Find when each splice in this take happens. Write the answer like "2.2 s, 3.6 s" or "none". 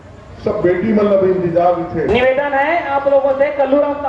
2.1 s

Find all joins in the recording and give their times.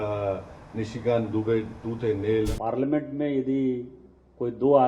2.5 s

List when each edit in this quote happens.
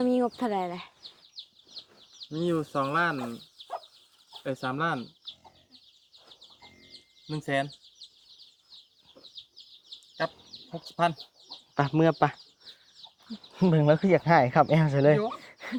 none

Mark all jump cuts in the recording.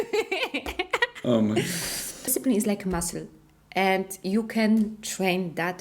1.2 s, 2.4 s

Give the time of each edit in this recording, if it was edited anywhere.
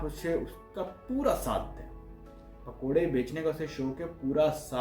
none

